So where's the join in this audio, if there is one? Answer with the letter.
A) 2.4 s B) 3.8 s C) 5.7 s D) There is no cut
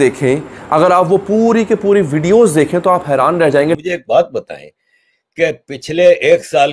B